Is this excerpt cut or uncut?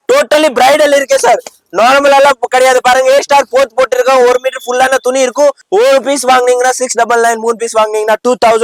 cut